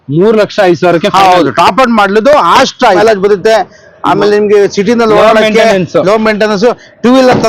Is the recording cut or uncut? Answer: cut